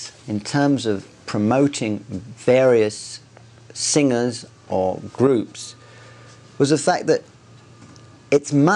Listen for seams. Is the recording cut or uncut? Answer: cut